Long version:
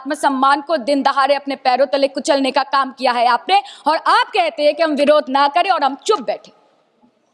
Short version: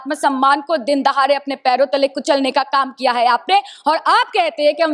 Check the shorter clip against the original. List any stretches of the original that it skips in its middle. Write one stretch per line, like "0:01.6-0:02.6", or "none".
none